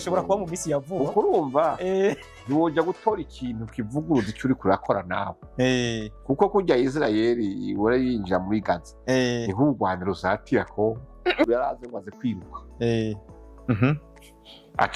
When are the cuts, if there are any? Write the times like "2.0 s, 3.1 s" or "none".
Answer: 11.5 s